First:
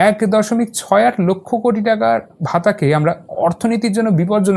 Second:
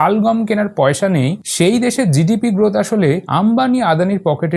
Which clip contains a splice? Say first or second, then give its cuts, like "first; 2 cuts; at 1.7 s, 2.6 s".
second; 2 cuts; at 1.4 s, 3.2 s